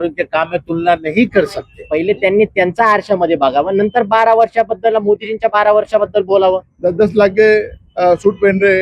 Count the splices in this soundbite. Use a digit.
2